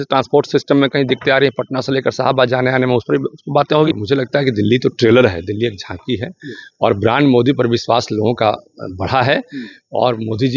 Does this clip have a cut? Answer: yes; 1 cut; at 3.9 s

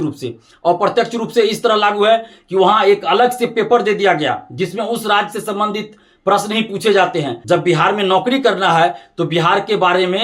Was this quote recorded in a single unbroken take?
no; 1 cut; at 7.3 s

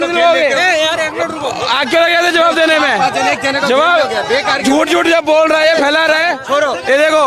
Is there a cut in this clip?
no; 0 cuts

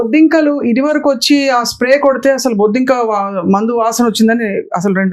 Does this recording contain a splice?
no; 0 cuts

